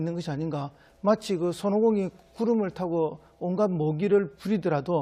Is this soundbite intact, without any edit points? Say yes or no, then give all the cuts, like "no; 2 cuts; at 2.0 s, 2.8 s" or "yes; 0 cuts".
no; 1 cut; at 2.3 s